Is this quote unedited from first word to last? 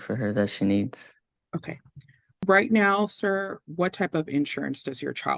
yes; 0 cuts

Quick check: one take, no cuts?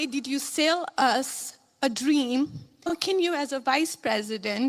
no; 1 cut; at 2.9 s

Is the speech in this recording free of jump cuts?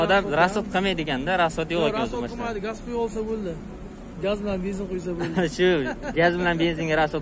yes; 0 cuts

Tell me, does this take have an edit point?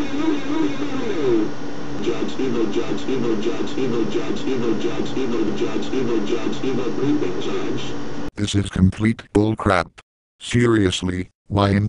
no; 0 cuts

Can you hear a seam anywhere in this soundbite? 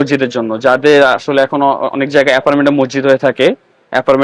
no; 0 cuts

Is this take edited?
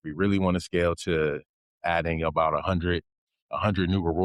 no; 0 cuts

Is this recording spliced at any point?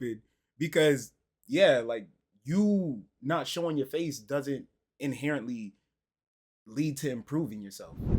no; 0 cuts

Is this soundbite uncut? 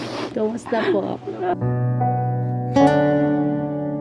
yes; 0 cuts

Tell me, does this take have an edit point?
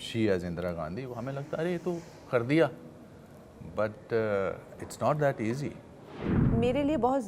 yes; 1 cut; at 6.4 s

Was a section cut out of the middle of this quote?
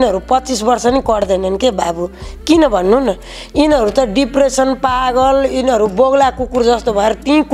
no; 0 cuts

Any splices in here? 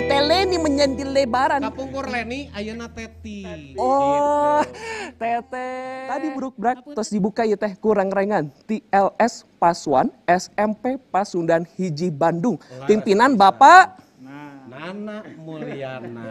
yes; 1 cut; at 5.9 s

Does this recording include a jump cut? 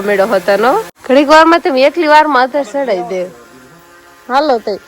yes; 1 cut; at 0.9 s

